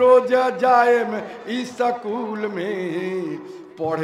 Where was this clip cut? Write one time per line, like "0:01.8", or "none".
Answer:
none